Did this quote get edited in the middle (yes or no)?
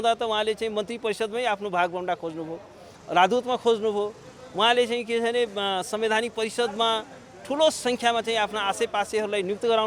no